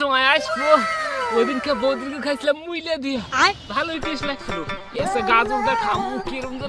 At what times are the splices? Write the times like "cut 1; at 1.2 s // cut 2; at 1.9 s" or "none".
none